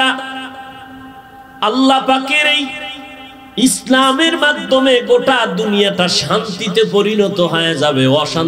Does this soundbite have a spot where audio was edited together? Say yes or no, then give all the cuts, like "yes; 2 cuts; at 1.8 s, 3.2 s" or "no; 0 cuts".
no; 0 cuts